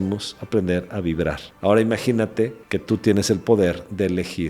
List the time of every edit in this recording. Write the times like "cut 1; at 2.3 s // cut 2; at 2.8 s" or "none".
cut 1; at 1.5 s // cut 2; at 2.7 s